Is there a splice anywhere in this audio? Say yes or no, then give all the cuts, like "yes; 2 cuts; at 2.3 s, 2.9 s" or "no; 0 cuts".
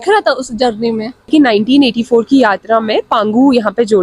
yes; 1 cut; at 1.3 s